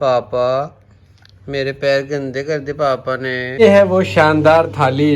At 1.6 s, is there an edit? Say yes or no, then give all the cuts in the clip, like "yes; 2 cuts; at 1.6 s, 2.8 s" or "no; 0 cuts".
no; 1 cut; at 3.6 s